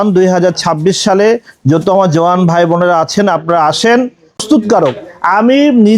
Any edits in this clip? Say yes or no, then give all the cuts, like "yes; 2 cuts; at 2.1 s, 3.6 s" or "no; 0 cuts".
yes; 1 cut; at 4.4 s